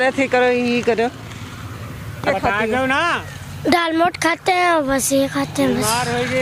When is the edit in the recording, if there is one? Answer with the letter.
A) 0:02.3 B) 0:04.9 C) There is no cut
A